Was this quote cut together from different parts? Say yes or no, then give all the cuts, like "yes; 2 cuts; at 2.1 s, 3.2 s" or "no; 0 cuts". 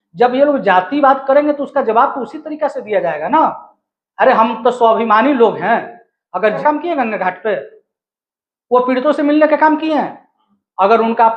yes; 1 cut; at 6.6 s